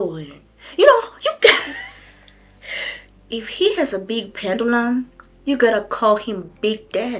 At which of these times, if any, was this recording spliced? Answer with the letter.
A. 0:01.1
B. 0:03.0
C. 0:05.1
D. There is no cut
B